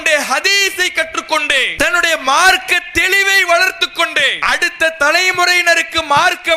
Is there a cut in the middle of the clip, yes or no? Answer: yes